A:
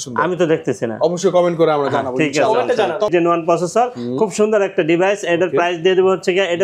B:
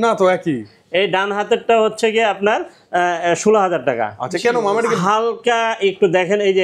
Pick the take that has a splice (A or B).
A